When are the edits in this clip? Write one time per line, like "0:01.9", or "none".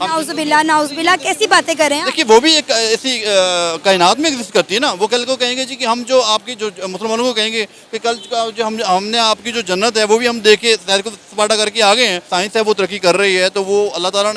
0:12.3